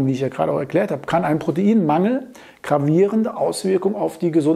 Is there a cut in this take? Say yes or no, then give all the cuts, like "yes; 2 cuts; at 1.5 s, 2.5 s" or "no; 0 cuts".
no; 0 cuts